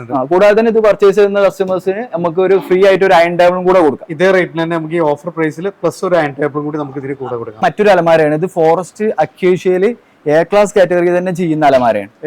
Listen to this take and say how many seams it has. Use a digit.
1